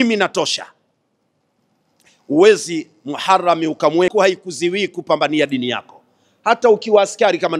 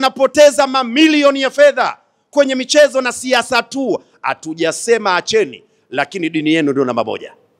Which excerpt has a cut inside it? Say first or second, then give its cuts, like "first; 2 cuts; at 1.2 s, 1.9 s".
first; 1 cut; at 4.1 s